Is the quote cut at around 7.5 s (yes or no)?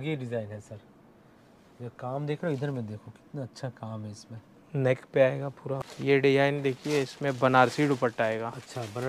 no